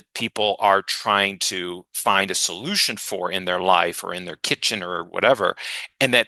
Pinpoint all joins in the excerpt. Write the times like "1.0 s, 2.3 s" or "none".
none